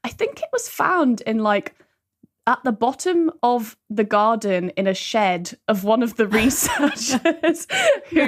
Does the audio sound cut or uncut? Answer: uncut